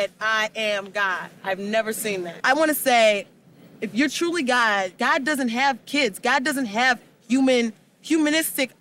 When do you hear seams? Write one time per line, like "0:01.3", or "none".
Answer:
0:02.3
0:04.9